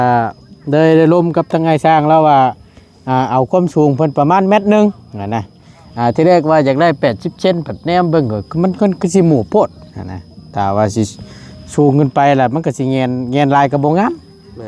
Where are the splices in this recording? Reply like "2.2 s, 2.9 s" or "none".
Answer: none